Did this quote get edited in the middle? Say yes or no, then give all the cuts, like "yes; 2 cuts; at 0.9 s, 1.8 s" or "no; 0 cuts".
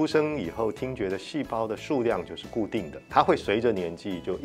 yes; 1 cut; at 3.0 s